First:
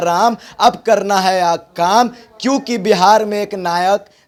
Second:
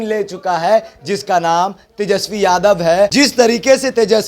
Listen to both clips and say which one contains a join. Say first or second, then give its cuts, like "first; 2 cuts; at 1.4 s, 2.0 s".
second; 1 cut; at 3.1 s